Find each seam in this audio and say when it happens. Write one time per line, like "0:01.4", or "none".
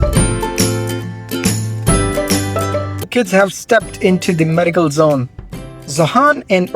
0:03.1